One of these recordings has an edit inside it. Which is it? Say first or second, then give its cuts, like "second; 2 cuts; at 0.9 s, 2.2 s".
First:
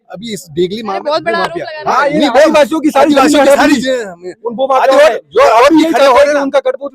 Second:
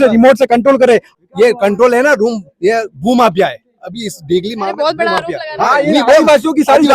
second; 1 cut; at 1.1 s